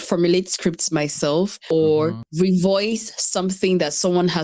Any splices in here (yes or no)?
yes